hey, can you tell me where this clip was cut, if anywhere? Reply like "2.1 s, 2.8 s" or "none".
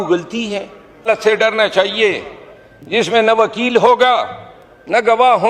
1.1 s